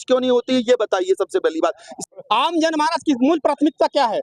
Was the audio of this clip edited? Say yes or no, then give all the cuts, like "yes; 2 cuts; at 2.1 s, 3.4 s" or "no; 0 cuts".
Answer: yes; 1 cut; at 2.0 s